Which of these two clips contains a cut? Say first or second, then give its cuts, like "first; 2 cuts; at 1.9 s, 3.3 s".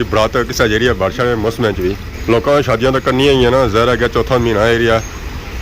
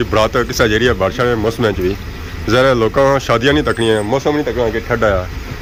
first; 1 cut; at 2.1 s